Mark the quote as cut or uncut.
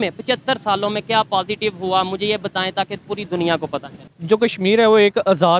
cut